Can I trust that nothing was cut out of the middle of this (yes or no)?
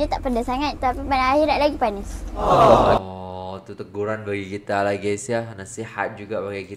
yes